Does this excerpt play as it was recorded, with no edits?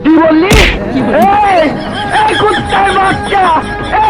yes; 0 cuts

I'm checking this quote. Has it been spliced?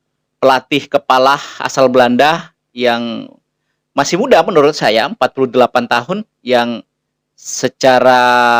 no; 0 cuts

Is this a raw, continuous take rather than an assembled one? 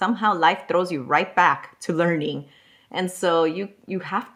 yes; 0 cuts

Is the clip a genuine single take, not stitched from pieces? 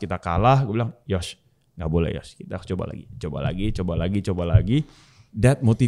yes; 0 cuts

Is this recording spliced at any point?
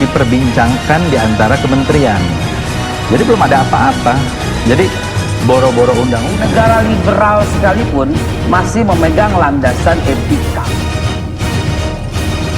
no; 0 cuts

